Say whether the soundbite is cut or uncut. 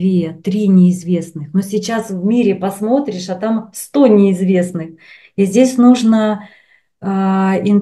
uncut